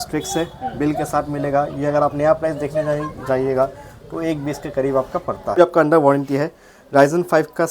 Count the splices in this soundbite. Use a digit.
1